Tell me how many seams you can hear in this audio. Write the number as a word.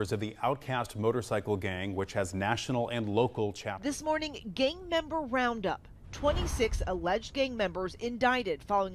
one